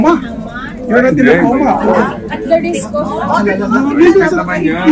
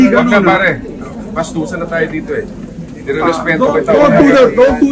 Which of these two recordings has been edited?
second; 1 cut; at 4.0 s

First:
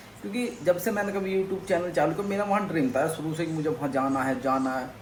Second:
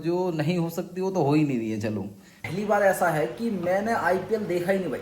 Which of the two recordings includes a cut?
second; 1 cut; at 2.4 s

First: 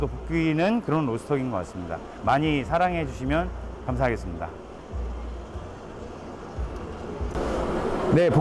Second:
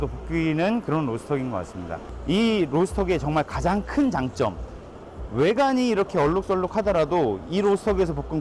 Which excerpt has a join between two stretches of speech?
second; 1 cut; at 2.1 s

